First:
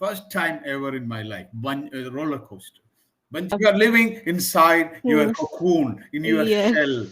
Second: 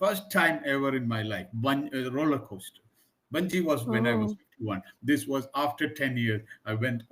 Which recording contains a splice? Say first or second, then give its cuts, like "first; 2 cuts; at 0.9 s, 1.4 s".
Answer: first; 1 cut; at 3.5 s